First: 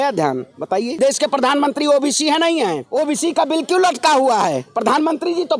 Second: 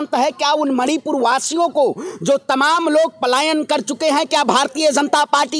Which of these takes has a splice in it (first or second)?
first